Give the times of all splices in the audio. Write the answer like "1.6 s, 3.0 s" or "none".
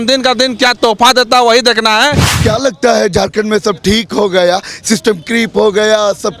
2.3 s